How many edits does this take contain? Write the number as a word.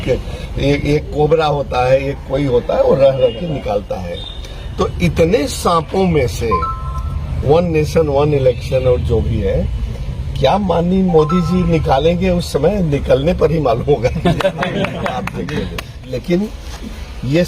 one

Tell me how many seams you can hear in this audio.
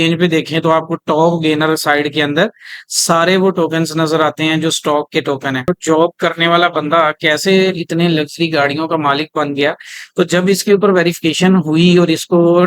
one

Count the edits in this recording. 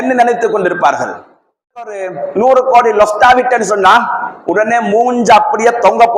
one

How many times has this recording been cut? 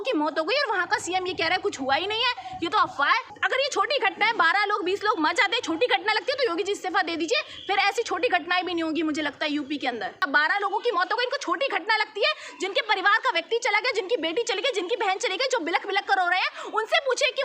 two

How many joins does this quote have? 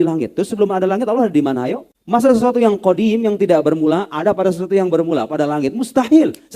one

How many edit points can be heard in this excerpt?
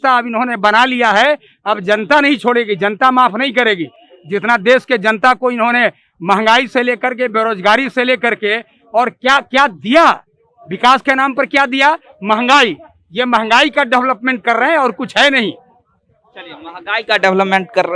zero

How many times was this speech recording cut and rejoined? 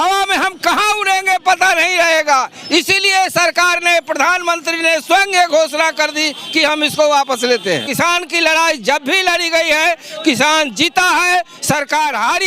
one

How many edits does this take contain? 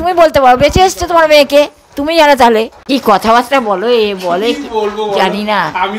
one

